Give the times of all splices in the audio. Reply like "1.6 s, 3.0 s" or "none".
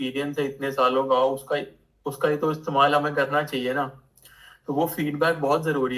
none